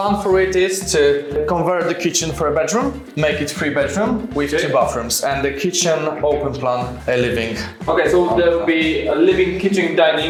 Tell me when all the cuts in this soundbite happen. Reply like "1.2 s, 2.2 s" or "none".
none